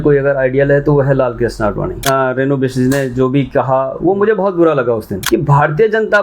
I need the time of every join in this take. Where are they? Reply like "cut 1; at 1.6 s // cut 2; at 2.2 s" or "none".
cut 1; at 2.0 s // cut 2; at 5.1 s